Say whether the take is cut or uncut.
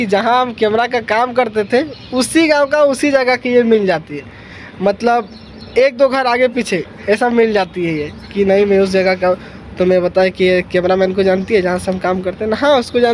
uncut